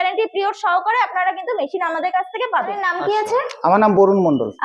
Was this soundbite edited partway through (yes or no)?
yes